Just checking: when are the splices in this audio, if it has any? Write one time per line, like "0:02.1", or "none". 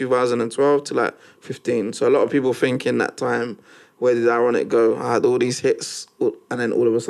none